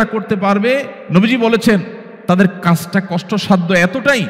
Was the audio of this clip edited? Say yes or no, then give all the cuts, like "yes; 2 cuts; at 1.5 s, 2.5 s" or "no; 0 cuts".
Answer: yes; 1 cut; at 1.0 s